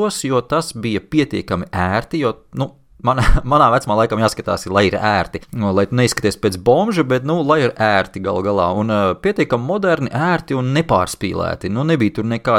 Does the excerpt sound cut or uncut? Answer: cut